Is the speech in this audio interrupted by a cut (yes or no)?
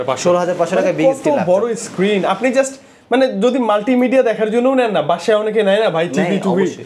no